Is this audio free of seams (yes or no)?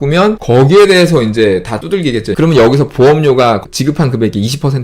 no